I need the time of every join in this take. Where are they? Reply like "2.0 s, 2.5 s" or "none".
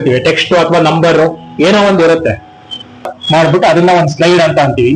3.2 s